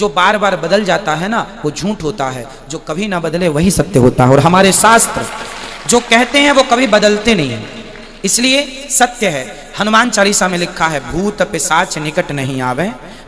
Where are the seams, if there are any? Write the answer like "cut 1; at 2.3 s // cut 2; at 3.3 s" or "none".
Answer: none

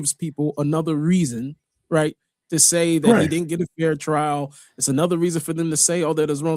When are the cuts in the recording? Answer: none

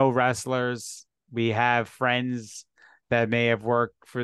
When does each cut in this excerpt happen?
none

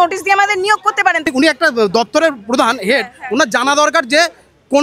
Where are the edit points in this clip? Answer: cut 1; at 1.3 s

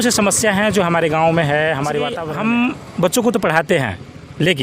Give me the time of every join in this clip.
cut 1; at 2.2 s

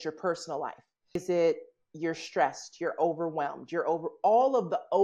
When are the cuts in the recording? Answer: cut 1; at 1.2 s

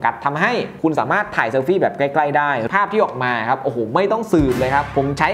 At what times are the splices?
cut 1; at 2.6 s

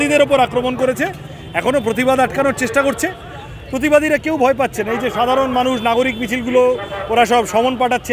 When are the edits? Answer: none

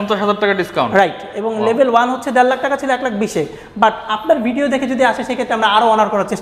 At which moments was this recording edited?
none

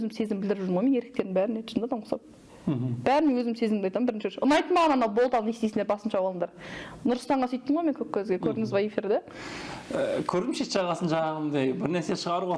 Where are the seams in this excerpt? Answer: none

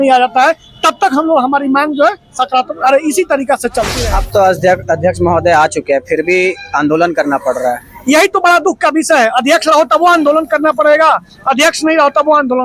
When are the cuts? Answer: cut 1; at 3.9 s

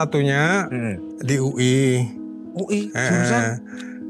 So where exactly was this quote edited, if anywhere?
cut 1; at 1.1 s

